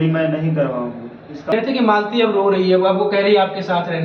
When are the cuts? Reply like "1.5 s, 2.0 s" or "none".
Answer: 1.5 s